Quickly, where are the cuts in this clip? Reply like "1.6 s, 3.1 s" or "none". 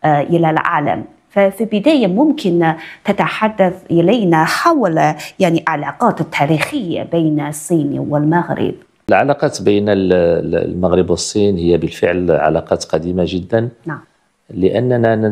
8.9 s